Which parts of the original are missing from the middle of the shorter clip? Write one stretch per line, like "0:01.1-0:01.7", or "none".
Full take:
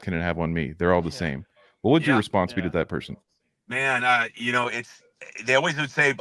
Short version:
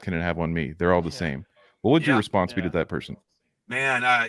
none